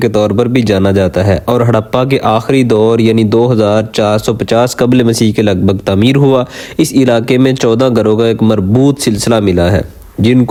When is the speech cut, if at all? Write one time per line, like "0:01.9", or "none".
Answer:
none